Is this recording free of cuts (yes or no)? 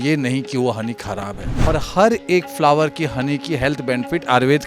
no